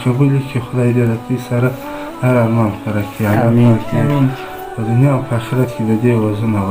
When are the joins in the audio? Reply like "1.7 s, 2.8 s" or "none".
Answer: none